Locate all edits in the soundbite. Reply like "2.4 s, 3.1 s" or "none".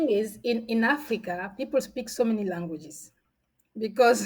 none